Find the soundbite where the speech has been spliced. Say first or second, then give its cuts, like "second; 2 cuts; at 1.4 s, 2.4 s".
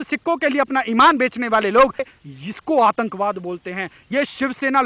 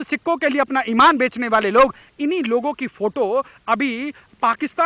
first; 1 cut; at 2.1 s